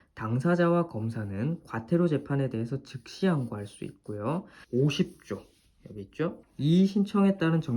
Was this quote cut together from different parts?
yes; 2 cuts; at 4.6 s, 6.4 s

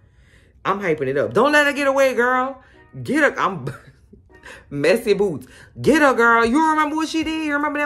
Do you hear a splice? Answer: no; 0 cuts

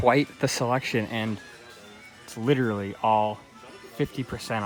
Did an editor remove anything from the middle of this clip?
no; 0 cuts

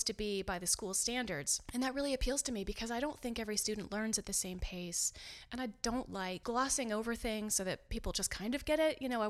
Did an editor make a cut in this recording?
yes; 2 cuts; at 1.6 s, 6.4 s

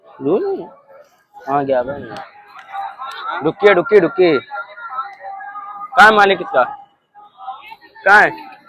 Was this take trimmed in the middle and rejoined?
no; 0 cuts

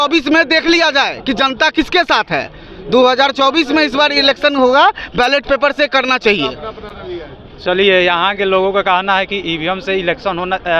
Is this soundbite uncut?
yes; 0 cuts

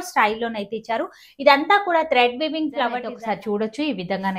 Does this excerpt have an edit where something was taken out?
yes; 1 cut; at 3.1 s

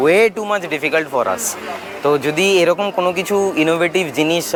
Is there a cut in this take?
no; 0 cuts

